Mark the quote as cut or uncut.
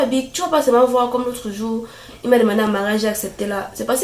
uncut